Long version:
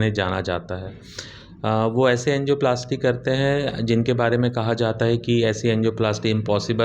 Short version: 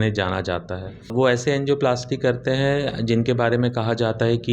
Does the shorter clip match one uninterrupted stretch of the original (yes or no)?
no